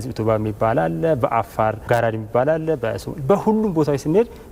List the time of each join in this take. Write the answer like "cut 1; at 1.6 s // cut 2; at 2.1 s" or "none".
cut 1; at 1.8 s